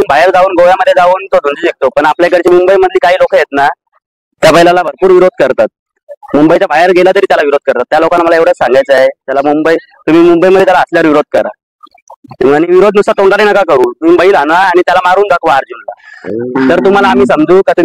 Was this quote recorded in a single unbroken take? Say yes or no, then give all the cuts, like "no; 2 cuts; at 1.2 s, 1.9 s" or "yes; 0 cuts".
yes; 0 cuts